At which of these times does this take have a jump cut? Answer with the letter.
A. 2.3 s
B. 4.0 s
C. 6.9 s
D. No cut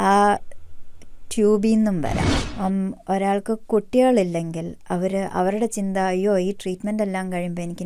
A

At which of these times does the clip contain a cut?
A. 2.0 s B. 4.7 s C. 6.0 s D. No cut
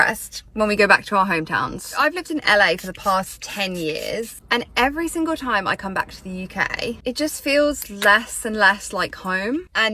A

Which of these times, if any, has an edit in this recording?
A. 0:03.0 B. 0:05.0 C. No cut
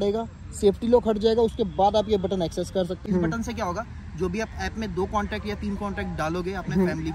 A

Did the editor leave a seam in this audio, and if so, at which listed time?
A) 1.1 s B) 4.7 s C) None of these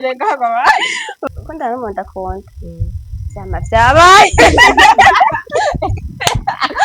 A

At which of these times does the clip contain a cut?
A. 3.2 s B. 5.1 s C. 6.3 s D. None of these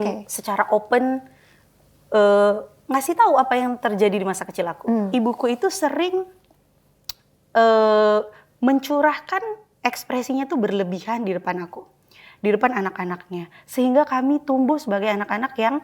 B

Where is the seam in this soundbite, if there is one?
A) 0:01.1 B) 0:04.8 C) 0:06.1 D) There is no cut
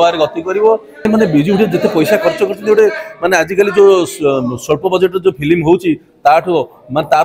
A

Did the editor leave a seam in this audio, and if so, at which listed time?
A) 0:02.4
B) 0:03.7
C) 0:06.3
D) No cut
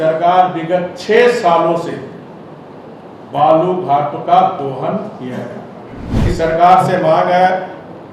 C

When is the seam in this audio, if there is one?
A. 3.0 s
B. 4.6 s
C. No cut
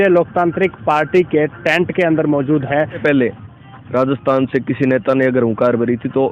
A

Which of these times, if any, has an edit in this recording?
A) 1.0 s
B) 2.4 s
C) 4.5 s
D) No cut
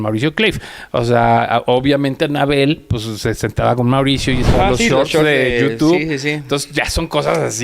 C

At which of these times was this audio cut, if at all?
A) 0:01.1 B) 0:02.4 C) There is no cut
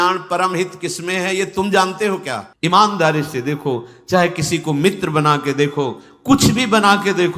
B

